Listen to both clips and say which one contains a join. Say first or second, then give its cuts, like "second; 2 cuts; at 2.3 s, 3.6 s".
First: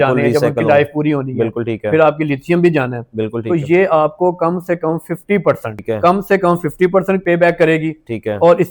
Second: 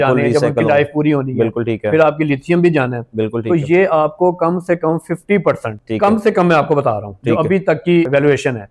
first; 1 cut; at 5.7 s